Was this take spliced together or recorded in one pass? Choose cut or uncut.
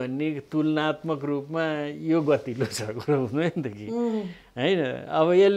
uncut